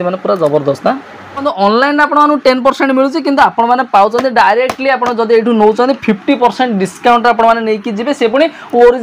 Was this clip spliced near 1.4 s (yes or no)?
yes